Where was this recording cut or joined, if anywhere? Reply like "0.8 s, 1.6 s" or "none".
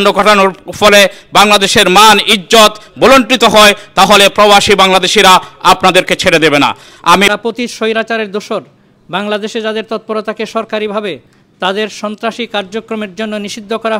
7.3 s